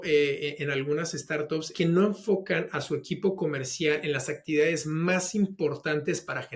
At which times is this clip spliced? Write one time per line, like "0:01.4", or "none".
0:01.7